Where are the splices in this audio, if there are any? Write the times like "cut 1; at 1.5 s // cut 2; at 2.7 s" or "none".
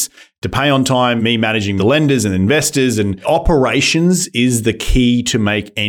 cut 1; at 1.7 s // cut 2; at 3.2 s